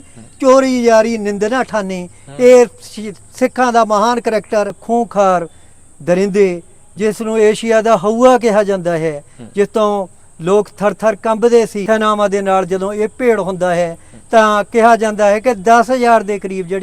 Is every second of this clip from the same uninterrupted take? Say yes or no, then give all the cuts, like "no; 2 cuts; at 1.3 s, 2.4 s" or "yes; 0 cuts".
no; 2 cuts; at 4.8 s, 11.8 s